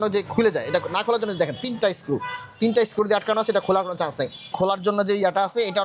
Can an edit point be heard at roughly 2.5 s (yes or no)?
no